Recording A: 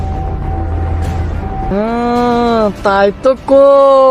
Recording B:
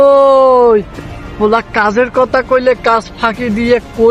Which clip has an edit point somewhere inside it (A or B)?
A